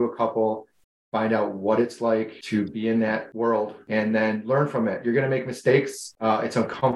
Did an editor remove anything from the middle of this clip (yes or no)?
yes